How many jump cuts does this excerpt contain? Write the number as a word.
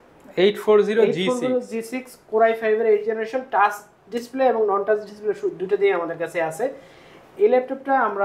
zero